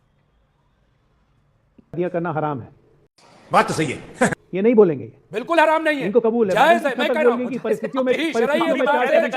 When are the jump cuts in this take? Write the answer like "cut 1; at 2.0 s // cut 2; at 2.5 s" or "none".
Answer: cut 1; at 2.0 s